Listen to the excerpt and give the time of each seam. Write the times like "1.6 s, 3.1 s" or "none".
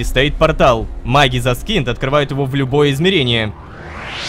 none